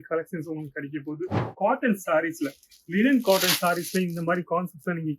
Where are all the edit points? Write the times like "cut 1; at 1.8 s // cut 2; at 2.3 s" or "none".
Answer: cut 1; at 1.4 s